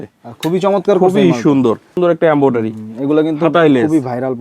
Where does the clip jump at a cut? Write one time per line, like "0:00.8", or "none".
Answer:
0:01.9